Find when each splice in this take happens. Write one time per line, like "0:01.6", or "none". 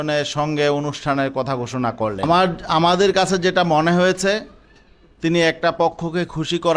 0:02.5